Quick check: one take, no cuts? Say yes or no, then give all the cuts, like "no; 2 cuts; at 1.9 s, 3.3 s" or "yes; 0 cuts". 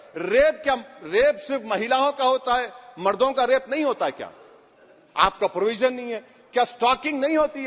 yes; 0 cuts